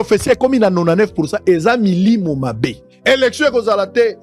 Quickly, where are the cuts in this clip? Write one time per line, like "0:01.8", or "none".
0:02.9